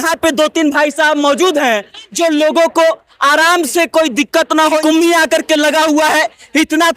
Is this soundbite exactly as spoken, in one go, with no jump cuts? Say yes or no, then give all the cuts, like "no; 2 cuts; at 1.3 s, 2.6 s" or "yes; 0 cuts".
no; 1 cut; at 4.8 s